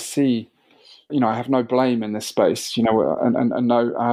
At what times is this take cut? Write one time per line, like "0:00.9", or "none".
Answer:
none